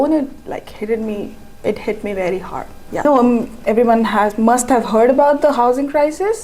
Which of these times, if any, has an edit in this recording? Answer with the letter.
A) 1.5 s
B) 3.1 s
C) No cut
B